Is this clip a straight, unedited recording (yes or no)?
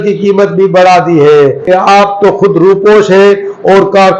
no